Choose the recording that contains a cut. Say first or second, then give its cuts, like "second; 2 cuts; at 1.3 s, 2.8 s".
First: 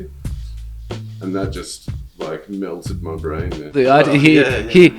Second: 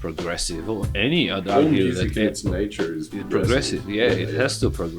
first; 1 cut; at 3.7 s